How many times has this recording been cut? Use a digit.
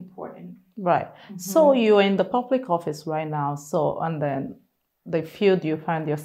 0